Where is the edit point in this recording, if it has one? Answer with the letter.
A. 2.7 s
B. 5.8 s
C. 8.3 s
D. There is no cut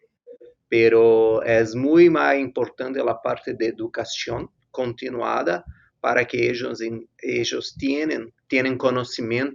C